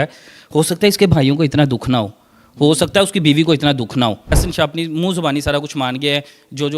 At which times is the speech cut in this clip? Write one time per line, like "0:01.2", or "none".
0:04.4